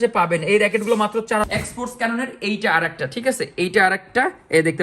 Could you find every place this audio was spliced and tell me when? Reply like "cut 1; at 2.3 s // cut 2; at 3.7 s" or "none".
cut 1; at 1.5 s

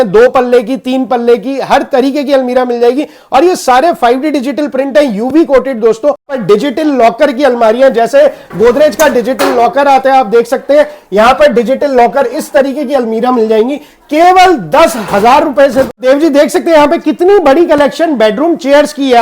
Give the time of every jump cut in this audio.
cut 1; at 6.4 s // cut 2; at 16.0 s

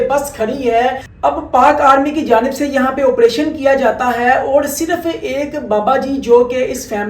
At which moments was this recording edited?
cut 1; at 1.1 s

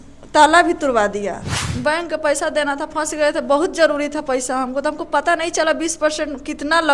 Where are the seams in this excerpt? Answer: cut 1; at 1.6 s

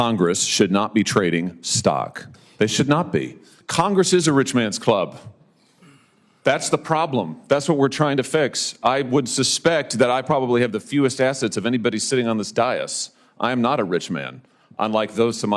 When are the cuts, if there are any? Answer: cut 1; at 3.6 s

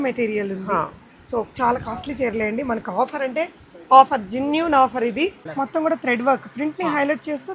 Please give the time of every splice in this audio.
cut 1; at 5.4 s

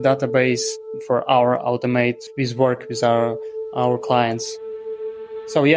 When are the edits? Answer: cut 1; at 2.2 s // cut 2; at 4.8 s

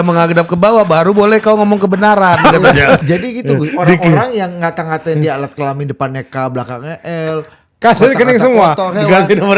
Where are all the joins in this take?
cut 1; at 3.0 s

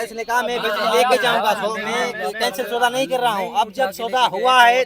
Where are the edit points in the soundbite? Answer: none

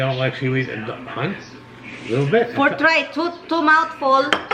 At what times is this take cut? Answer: none

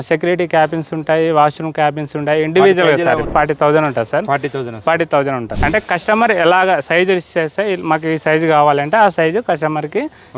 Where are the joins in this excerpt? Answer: cut 1; at 3.3 s // cut 2; at 5.5 s

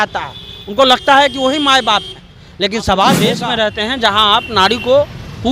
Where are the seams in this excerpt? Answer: cut 1; at 3.4 s

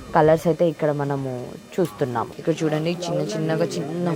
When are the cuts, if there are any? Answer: cut 1; at 2.3 s

